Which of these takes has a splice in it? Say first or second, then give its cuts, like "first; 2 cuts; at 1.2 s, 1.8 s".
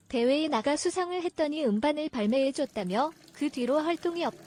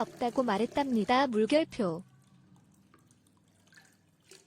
second; 1 cut; at 2.1 s